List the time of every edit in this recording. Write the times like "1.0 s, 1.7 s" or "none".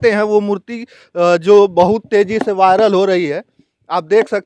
none